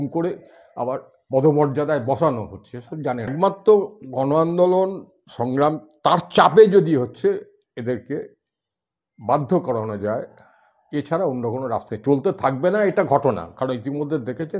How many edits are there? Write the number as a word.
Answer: one